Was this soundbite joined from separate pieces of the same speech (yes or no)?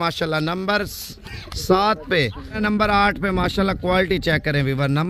yes